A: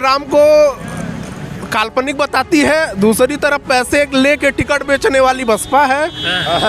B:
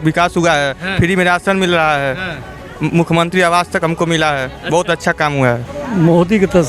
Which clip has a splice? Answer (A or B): B